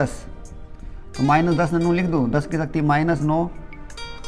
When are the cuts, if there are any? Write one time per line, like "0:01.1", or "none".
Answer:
none